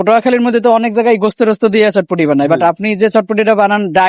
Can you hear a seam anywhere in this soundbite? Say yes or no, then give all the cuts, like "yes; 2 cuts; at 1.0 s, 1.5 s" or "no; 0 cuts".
no; 0 cuts